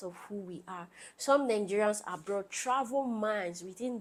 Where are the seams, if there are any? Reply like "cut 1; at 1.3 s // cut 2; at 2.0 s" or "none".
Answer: none